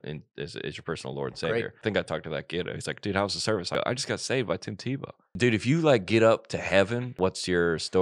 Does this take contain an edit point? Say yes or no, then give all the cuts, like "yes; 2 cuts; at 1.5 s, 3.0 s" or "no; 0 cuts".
yes; 4 cuts; at 1.8 s, 3.7 s, 5.3 s, 7.1 s